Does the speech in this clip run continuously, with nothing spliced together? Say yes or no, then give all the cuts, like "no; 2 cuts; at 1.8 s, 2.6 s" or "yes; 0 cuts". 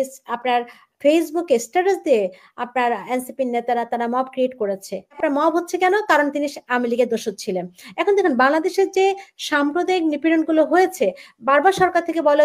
no; 1 cut; at 5.2 s